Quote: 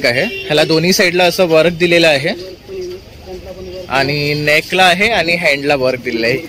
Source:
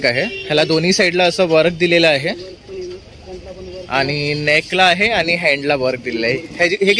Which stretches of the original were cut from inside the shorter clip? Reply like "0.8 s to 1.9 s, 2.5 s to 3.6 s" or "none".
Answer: none